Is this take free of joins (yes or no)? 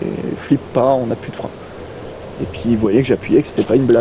yes